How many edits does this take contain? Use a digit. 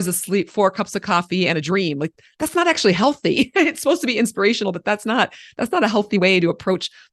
0